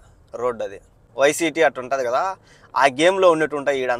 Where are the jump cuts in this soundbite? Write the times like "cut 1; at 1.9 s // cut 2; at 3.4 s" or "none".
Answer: cut 1; at 1.0 s